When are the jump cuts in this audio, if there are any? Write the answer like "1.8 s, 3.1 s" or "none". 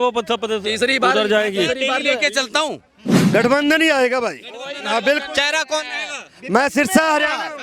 3.1 s